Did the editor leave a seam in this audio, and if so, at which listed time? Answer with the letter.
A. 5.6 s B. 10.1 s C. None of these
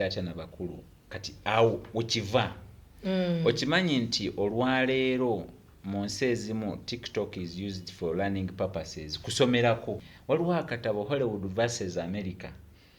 B